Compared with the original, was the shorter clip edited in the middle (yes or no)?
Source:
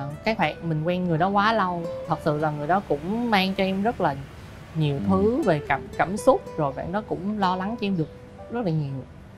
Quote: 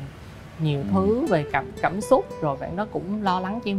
no